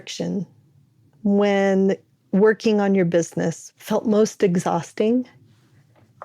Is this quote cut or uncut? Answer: cut